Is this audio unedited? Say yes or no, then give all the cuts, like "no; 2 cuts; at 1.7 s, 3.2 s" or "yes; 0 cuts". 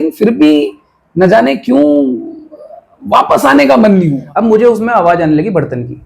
no; 1 cut; at 4.2 s